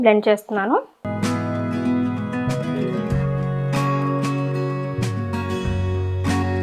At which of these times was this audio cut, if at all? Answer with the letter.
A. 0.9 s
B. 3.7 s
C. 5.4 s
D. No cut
D